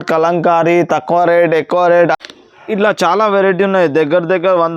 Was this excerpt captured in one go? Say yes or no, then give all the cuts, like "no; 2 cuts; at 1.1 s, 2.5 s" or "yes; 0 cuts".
no; 1 cut; at 2.0 s